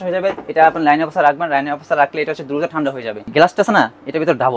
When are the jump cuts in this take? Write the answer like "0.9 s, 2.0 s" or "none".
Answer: 3.3 s